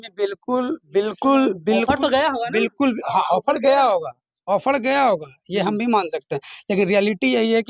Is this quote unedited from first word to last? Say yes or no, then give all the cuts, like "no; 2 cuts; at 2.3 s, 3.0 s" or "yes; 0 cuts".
yes; 0 cuts